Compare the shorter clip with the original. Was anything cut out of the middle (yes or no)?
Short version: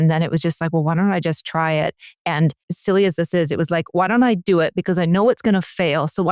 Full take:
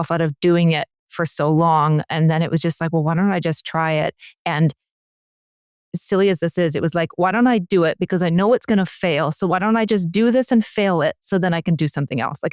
yes